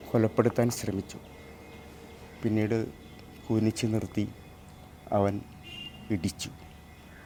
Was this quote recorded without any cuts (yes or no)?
yes